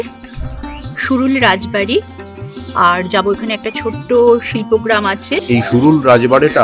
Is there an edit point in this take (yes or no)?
yes